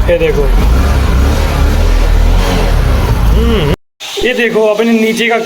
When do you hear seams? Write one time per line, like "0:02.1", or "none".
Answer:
0:03.7